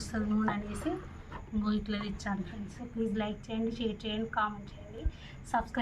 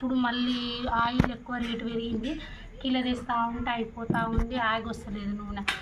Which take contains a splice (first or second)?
first